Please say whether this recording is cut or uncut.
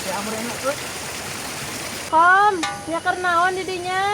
cut